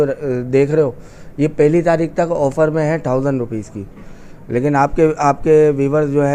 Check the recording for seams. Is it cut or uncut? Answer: uncut